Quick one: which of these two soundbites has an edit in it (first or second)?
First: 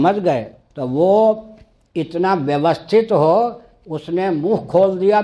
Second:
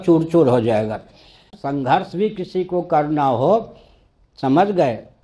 second